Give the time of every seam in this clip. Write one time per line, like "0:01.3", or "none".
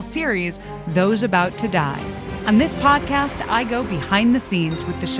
0:02.3